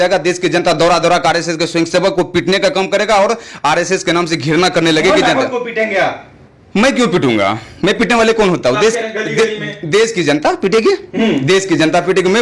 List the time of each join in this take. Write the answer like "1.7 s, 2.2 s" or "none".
none